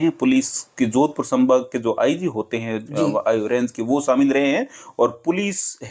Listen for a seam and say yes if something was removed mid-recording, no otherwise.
no